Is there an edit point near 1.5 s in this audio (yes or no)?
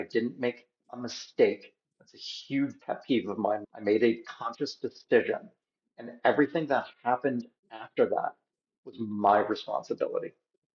no